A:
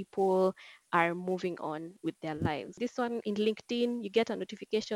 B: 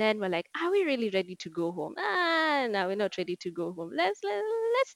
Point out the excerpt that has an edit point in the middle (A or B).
A